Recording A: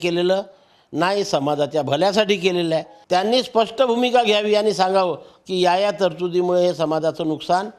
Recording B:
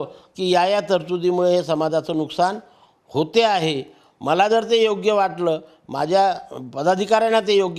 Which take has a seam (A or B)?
A